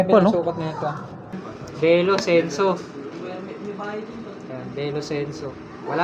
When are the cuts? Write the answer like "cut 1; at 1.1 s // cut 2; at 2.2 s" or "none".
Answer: cut 1; at 1.3 s